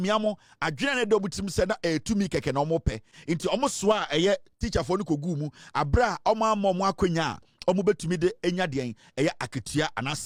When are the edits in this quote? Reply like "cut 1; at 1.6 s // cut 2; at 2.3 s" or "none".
none

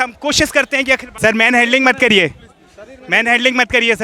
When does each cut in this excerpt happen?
cut 1; at 1.1 s

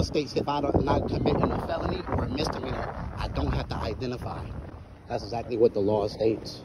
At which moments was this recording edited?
none

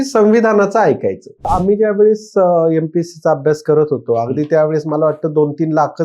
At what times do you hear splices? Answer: cut 1; at 1.5 s

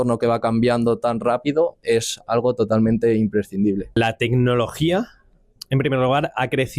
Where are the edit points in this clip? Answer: cut 1; at 3.9 s

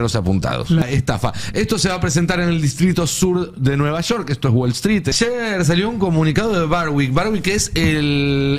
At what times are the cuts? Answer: cut 1; at 0.8 s // cut 2; at 5.1 s

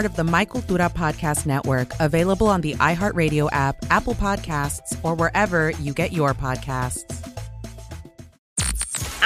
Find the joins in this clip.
cut 1; at 8.3 s

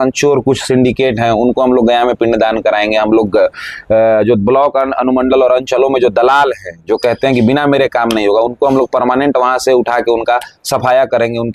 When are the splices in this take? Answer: none

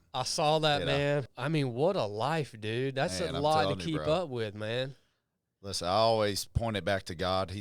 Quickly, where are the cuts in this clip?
cut 1; at 1.3 s

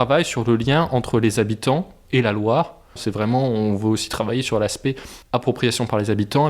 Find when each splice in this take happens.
cut 1; at 2.0 s // cut 2; at 3.0 s

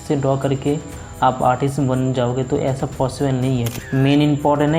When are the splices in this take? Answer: cut 1; at 3.7 s

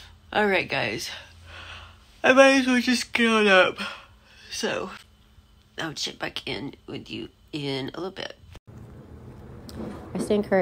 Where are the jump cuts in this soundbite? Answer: cut 1; at 8.5 s

